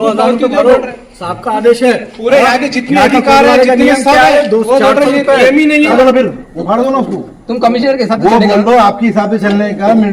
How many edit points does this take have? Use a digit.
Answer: 1